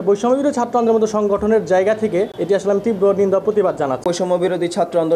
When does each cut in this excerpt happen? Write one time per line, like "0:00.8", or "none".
0:02.3
0:04.0